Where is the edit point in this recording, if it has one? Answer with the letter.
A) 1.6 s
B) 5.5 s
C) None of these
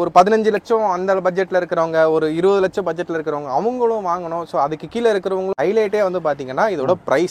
B